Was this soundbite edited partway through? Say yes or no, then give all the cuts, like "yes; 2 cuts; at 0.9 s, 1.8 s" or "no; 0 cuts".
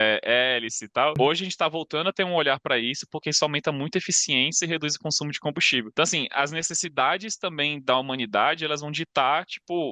yes; 2 cuts; at 1.1 s, 5.9 s